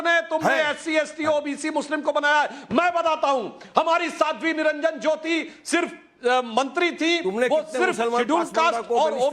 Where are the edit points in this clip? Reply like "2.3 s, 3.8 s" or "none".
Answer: 2.6 s